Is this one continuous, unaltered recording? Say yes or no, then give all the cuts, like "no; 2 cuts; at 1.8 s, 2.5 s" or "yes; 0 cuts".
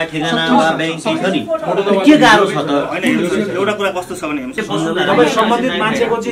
no; 1 cut; at 4.6 s